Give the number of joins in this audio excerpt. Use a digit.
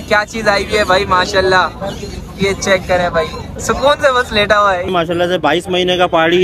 1